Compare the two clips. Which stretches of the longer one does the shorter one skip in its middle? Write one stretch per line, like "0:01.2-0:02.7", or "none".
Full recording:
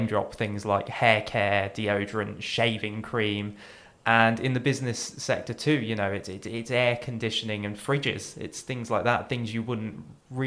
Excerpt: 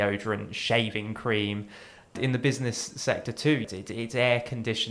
0:04.0-0:04.4
0:05.9-0:06.2

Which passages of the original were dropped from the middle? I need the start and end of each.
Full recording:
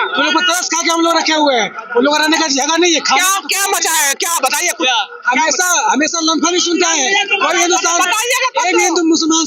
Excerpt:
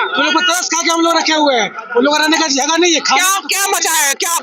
none

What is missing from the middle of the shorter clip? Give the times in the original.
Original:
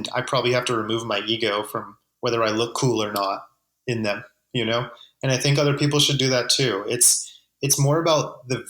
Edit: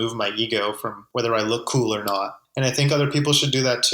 0:01.8-0:02.0
0:03.5-0:05.1

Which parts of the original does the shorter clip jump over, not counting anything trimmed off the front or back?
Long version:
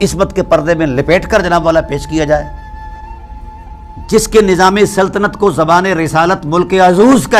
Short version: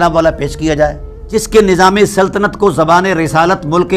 0:02.6-0:03.9

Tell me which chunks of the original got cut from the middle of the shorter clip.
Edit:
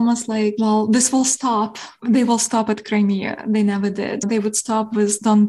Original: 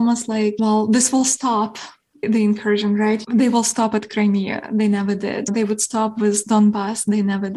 0:02.0-0:03.2

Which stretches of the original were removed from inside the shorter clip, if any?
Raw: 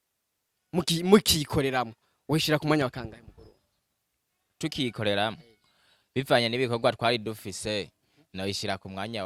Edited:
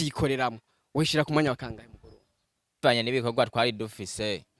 0:04.1-0:06.3

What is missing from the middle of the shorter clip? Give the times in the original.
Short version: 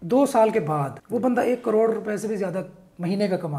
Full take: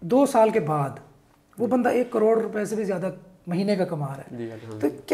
0:01.0-0:01.4

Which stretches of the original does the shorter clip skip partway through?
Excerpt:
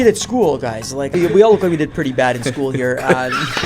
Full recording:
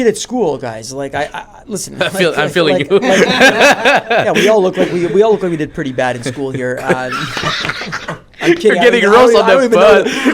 0:01.1-0:04.9

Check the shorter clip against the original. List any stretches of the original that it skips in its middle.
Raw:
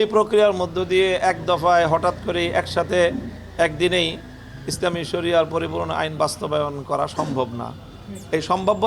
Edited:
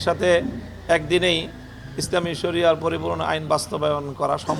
none

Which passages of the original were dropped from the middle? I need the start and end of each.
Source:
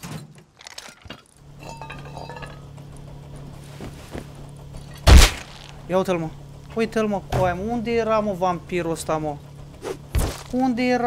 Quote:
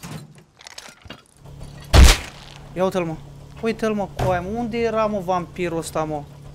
0:01.4-0:04.6

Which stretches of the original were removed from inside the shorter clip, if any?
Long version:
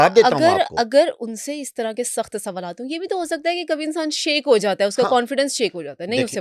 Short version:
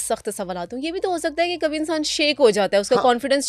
none

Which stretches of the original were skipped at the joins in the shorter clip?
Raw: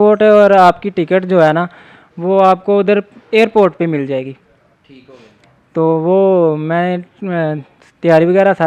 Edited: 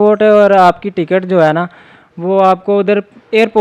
none

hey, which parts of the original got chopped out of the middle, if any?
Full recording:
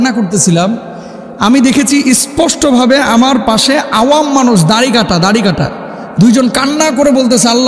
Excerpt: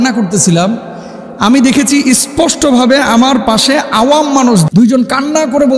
0:04.7-0:06.1

